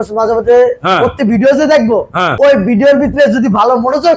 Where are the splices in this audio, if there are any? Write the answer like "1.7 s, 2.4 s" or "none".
2.2 s